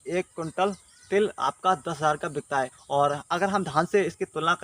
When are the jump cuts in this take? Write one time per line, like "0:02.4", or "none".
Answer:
0:02.8